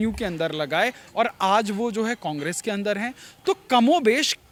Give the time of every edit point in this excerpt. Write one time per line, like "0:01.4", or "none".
none